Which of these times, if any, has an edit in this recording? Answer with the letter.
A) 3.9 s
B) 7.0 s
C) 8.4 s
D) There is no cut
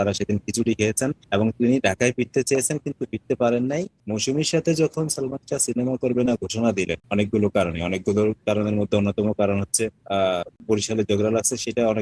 A